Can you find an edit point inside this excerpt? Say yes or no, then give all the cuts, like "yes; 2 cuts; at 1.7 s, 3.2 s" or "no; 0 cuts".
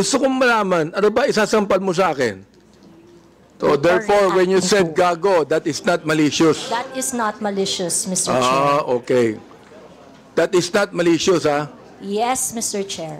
yes; 1 cut; at 3.5 s